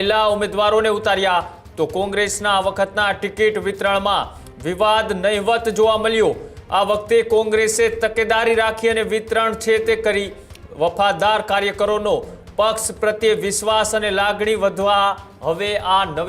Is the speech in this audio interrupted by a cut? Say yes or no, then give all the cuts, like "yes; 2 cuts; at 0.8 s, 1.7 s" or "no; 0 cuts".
no; 0 cuts